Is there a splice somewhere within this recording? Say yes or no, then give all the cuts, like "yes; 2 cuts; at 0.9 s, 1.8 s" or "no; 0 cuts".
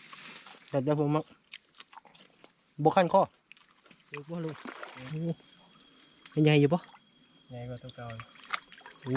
yes; 2 cuts; at 2.4 s, 4.2 s